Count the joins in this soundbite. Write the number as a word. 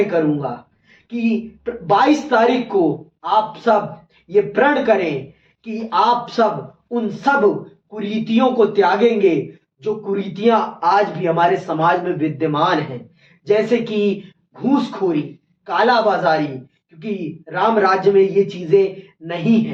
zero